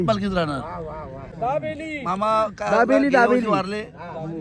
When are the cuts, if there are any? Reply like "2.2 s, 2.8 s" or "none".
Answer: 1.3 s